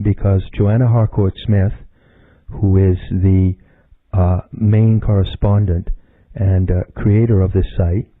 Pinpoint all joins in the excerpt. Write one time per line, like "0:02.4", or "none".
0:03.0